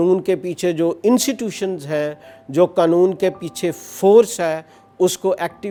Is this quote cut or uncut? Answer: uncut